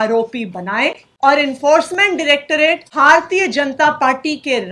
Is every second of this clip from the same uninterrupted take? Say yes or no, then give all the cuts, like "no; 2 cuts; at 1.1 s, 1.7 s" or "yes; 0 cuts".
no; 2 cuts; at 1.1 s, 2.9 s